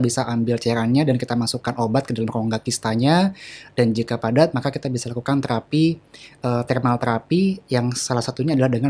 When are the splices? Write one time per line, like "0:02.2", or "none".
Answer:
none

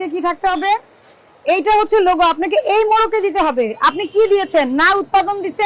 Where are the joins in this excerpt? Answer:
none

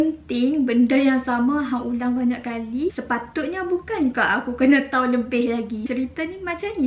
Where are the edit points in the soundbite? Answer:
0:03.0
0:05.8

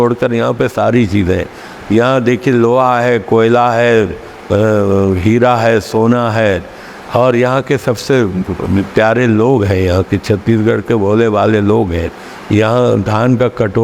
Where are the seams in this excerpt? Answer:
none

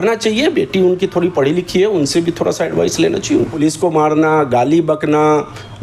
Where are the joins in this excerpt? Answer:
0:03.5

